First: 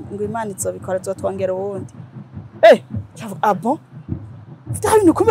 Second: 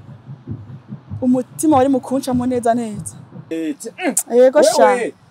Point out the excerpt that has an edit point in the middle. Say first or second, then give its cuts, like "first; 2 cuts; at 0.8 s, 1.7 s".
second; 1 cut; at 3.5 s